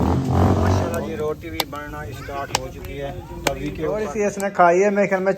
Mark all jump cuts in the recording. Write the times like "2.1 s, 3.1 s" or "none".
0.9 s, 4.1 s